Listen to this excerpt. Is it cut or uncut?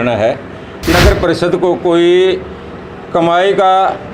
cut